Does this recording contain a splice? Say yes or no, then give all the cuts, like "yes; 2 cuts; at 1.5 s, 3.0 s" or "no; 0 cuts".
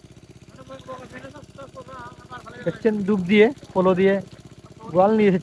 no; 0 cuts